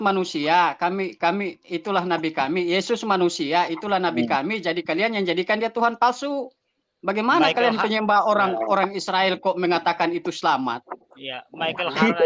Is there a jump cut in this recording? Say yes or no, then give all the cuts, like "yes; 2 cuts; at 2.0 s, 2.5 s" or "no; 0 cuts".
no; 0 cuts